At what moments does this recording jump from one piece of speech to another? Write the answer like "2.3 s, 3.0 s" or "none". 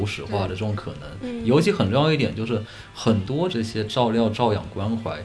3.5 s